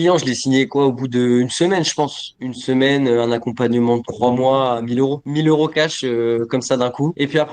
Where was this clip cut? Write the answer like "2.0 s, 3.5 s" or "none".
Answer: none